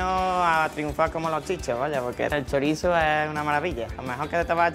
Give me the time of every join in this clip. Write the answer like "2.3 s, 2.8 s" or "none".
2.3 s